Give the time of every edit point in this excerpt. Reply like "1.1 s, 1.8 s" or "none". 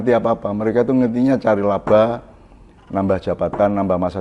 none